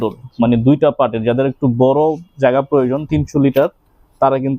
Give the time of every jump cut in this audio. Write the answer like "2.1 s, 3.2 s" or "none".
none